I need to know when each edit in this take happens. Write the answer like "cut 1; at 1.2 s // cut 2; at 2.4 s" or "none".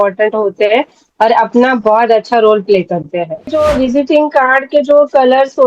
cut 1; at 3.5 s